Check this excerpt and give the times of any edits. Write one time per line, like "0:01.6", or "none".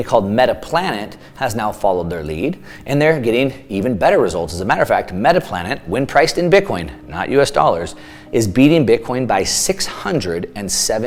none